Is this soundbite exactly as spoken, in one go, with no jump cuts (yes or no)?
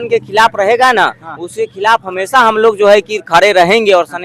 yes